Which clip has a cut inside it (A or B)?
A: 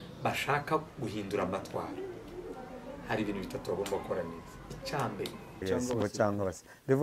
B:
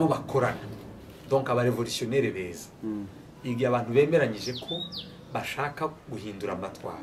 A